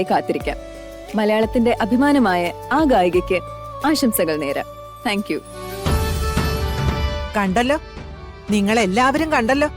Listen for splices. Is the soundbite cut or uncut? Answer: cut